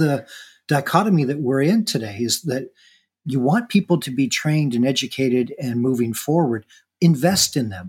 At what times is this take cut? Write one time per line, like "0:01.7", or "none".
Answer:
none